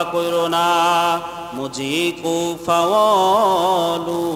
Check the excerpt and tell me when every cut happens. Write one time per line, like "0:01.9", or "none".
none